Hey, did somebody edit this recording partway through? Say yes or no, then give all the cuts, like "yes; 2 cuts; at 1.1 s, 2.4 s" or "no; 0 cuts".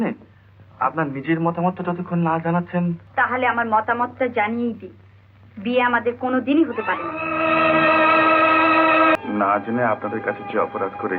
yes; 2 cuts; at 3.0 s, 9.2 s